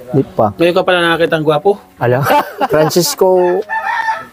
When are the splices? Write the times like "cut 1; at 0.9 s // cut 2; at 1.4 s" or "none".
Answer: cut 1; at 2.7 s